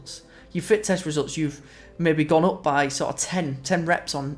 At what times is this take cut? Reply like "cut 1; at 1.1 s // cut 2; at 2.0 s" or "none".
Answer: none

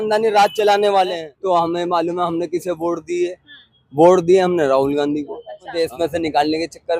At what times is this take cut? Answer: cut 1; at 1.3 s // cut 2; at 5.7 s

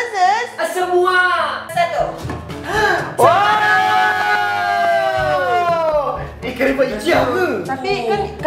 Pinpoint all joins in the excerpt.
cut 1; at 1.7 s

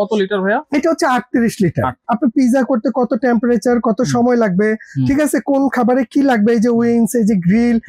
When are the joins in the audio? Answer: cut 1; at 2.0 s

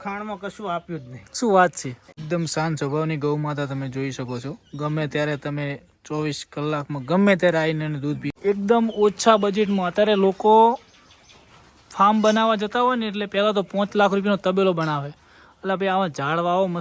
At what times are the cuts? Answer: cut 1; at 2.2 s // cut 2; at 8.3 s

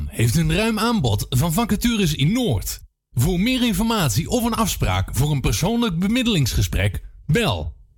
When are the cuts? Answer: none

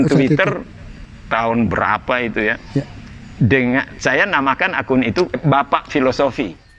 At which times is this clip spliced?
cut 1; at 5.4 s

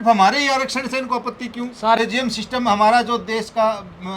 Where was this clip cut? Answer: cut 1; at 2.0 s

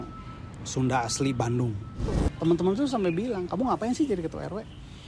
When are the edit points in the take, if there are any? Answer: cut 1; at 2.2 s

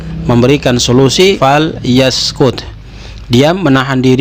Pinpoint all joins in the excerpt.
cut 1; at 1.4 s

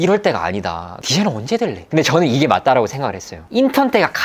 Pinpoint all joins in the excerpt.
cut 1; at 0.9 s // cut 2; at 1.8 s // cut 3; at 3.4 s

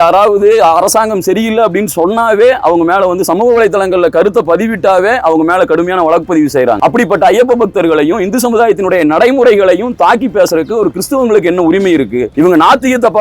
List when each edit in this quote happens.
cut 1; at 6.8 s

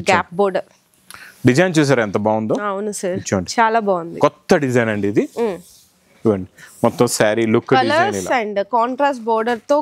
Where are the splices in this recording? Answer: none

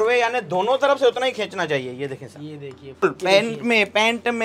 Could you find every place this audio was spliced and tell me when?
cut 1; at 3.0 s

